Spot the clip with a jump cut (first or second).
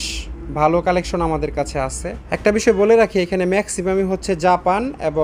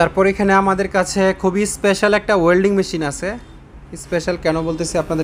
first